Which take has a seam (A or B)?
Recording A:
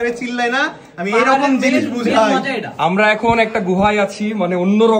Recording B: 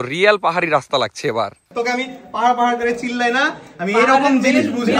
B